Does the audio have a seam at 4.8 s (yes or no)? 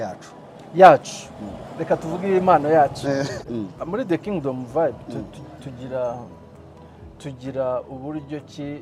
no